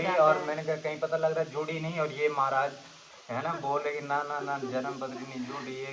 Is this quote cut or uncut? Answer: uncut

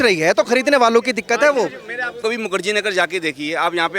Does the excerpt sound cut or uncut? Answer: cut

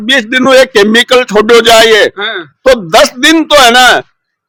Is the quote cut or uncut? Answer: uncut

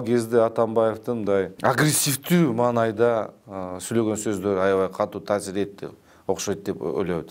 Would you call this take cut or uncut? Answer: cut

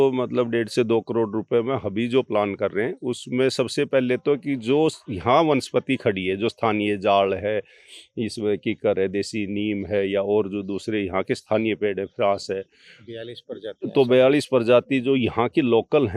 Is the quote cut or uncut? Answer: uncut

